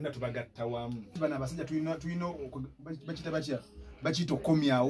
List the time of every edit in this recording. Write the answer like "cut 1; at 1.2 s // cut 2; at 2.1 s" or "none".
cut 1; at 1.1 s